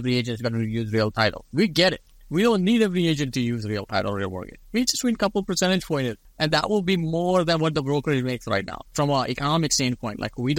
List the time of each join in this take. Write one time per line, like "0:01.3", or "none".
0:02.0
0:06.2
0:08.9